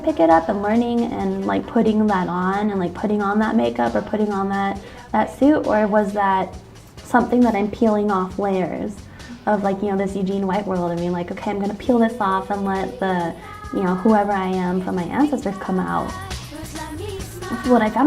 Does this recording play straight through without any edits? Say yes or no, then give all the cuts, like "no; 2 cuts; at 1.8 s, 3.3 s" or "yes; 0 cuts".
no; 2 cuts; at 1.5 s, 15.6 s